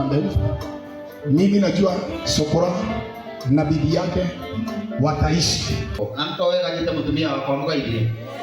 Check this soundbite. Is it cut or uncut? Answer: cut